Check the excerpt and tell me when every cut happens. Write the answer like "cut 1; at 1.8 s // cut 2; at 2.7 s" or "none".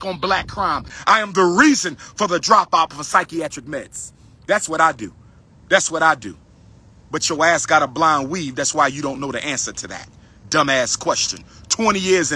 cut 1; at 0.9 s